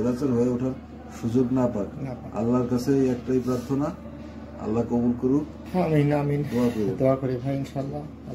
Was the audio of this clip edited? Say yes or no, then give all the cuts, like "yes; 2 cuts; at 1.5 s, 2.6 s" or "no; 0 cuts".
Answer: yes; 1 cut; at 5.6 s